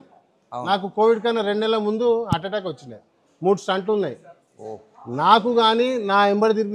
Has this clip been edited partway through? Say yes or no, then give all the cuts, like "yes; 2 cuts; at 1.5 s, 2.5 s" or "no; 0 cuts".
no; 0 cuts